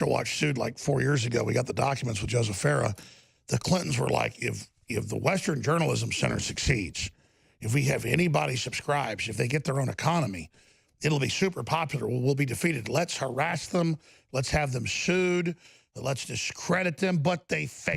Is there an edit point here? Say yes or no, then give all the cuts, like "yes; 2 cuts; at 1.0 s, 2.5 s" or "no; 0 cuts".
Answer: no; 0 cuts